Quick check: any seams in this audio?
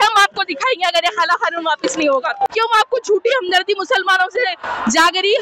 yes; 1 cut; at 2.5 s

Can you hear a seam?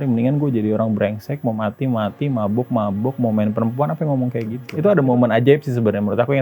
yes; 1 cut; at 4.6 s

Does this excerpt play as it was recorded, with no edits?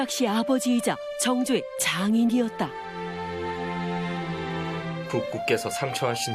yes; 0 cuts

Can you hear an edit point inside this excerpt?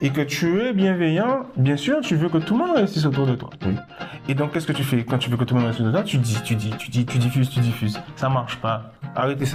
no; 0 cuts

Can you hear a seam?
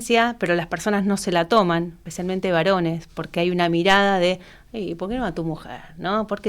yes; 1 cut; at 2.0 s

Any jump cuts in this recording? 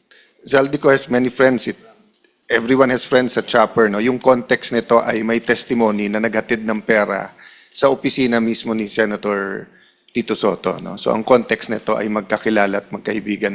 no; 0 cuts

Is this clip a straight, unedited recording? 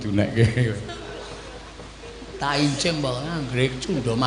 yes; 0 cuts

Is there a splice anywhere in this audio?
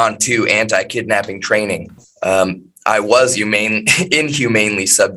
no; 0 cuts

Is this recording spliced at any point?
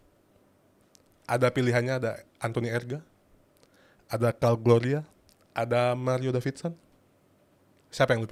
no; 0 cuts

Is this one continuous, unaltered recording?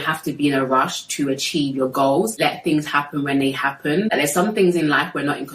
no; 2 cuts; at 2.3 s, 4.1 s

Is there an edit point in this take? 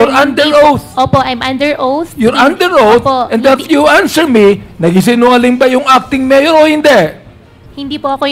no; 0 cuts

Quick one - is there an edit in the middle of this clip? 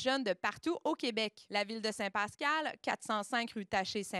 no; 0 cuts

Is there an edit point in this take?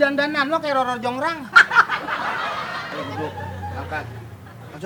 yes; 1 cut; at 2.8 s

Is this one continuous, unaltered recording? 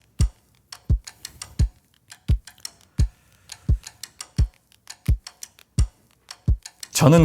yes; 0 cuts

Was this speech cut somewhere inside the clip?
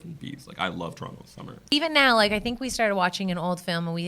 yes; 1 cut; at 1.7 s

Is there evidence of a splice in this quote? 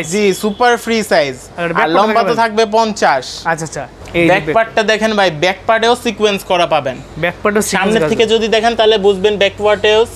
no; 0 cuts

